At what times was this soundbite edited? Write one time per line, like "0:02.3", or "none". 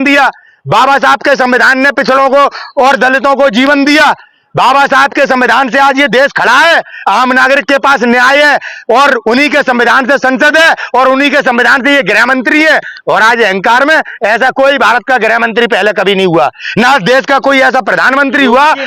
none